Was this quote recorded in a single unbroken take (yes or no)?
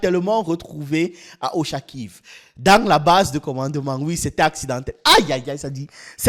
yes